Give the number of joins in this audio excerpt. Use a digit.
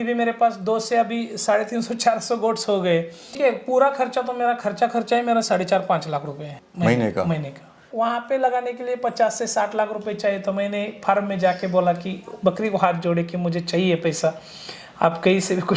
3